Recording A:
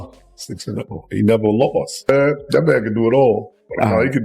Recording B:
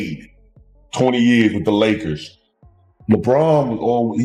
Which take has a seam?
A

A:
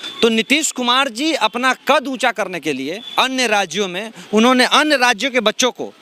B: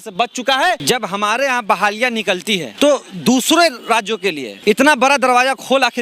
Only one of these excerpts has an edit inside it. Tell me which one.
B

